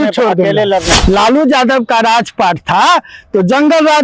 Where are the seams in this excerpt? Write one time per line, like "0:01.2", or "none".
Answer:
0:00.9